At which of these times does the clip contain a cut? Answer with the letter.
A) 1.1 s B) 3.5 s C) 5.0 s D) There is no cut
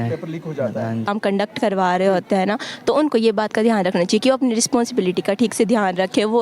A